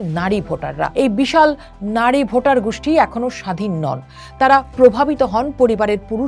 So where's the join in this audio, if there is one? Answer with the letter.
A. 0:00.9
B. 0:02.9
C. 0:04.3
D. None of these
A